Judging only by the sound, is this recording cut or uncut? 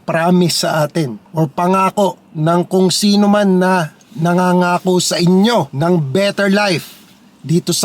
cut